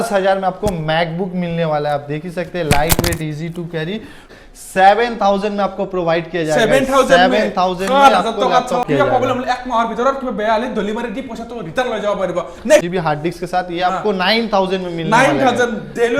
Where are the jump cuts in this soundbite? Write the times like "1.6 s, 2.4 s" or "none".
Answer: 4.3 s, 8.8 s, 12.9 s